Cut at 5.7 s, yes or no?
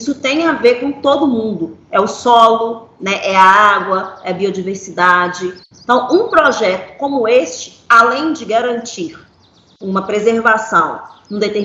yes